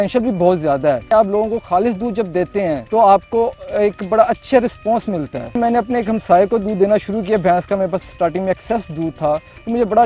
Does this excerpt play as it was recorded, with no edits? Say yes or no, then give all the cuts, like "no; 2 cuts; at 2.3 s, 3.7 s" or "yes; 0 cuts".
no; 3 cuts; at 1.0 s, 2.8 s, 5.6 s